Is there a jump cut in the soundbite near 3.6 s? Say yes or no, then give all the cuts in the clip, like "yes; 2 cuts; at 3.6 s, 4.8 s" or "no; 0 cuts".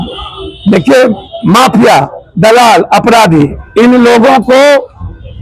yes; 1 cut; at 3.6 s